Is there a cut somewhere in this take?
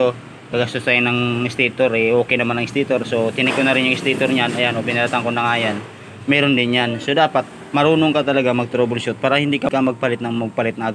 yes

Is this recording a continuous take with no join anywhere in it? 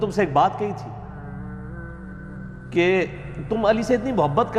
yes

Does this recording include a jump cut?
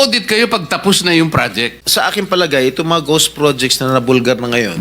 yes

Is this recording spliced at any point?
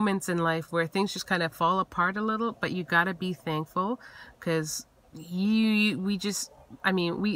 no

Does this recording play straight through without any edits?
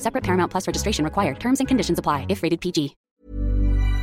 no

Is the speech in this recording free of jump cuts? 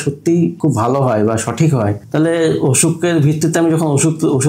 no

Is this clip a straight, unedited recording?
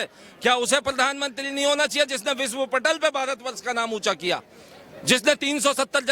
yes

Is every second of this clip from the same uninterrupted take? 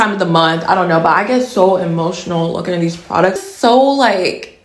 no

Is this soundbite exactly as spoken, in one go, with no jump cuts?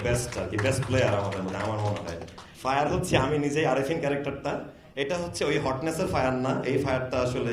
yes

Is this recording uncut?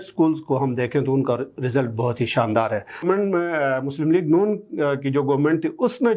no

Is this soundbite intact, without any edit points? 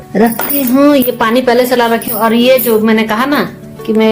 yes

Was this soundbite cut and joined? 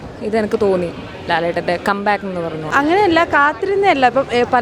yes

